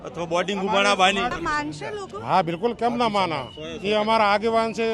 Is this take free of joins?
no; 1 cut; at 1.3 s

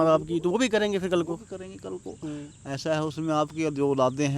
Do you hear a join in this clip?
no; 0 cuts

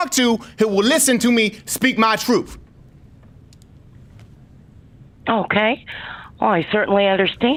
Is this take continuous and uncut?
yes; 0 cuts

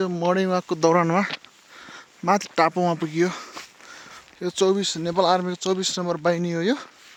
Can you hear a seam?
no; 0 cuts

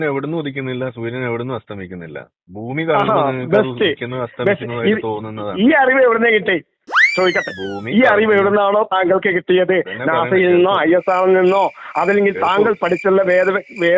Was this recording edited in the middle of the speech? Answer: no; 0 cuts

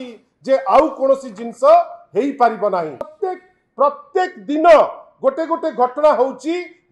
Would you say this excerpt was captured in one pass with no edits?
no; 1 cut; at 3.1 s

